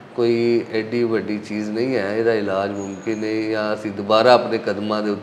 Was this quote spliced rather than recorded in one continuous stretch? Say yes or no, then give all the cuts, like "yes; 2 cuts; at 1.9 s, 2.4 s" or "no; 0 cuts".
no; 0 cuts